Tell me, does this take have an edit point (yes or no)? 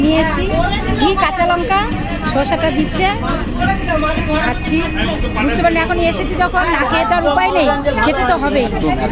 no